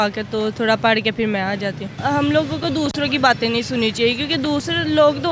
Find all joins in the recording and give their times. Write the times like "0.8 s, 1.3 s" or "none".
2.0 s